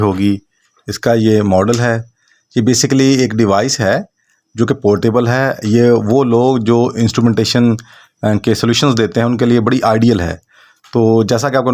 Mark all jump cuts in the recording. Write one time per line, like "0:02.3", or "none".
none